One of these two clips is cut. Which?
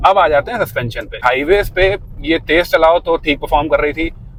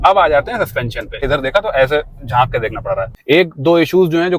second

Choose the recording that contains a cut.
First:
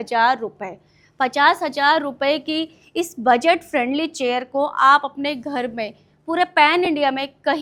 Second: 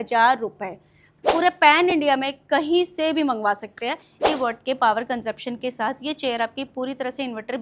second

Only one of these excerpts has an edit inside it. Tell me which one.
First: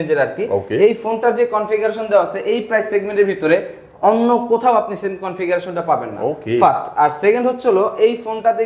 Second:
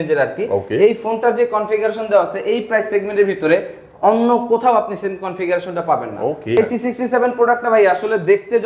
second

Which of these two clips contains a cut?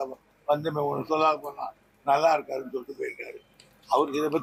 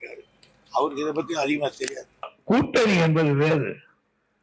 second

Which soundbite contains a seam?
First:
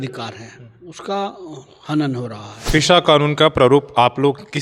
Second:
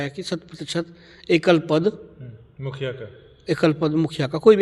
first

